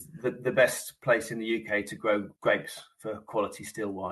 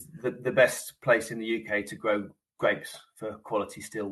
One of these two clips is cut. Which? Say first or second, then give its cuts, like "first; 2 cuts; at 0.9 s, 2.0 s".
first; 1 cut; at 2.3 s